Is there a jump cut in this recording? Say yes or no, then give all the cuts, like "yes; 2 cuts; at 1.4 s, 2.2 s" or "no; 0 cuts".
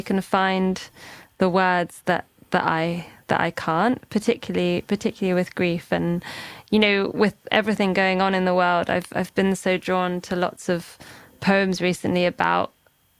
no; 0 cuts